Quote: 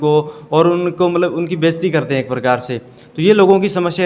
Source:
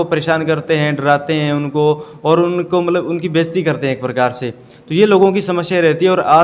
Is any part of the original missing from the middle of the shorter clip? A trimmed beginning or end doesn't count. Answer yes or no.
no